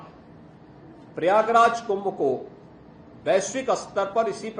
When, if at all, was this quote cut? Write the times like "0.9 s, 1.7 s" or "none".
none